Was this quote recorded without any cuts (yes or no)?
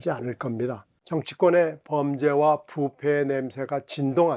no